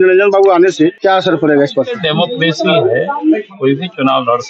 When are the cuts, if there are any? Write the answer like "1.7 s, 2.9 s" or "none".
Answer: 1.0 s, 2.0 s